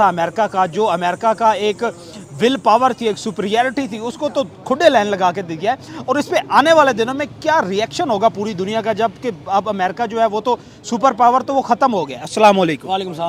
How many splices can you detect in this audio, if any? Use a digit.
0